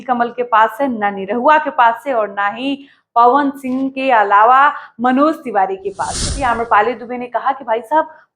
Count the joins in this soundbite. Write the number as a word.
one